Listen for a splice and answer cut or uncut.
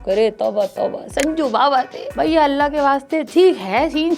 uncut